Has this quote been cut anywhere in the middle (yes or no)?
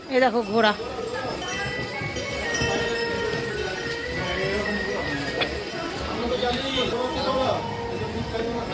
no